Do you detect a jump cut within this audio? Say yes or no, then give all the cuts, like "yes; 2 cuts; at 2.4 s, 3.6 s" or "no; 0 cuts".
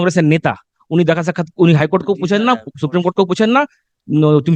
no; 0 cuts